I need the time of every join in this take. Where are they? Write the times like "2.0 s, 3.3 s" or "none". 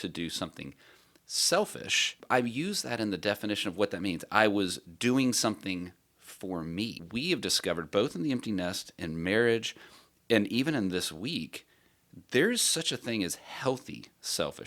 2.2 s, 7.0 s